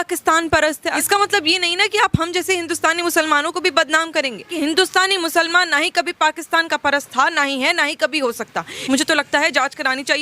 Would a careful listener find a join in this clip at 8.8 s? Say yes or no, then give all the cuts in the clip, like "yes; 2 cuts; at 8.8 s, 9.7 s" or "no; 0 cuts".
yes; 3 cuts; at 0.9 s, 4.5 s, 8.8 s